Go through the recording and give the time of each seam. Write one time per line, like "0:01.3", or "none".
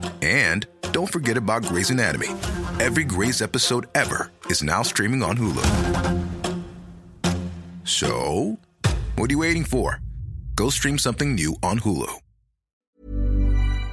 0:12.9